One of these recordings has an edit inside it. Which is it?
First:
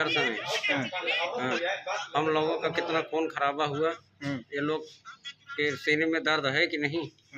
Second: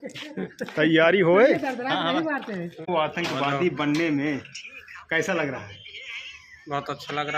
second; 1 cut; at 2.9 s

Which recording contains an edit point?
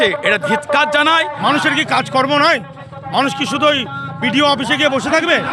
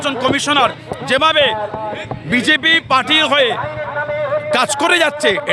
first; 1 cut; at 1.3 s

